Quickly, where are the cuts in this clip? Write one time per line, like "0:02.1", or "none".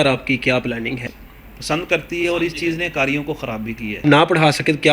0:01.0
0:04.0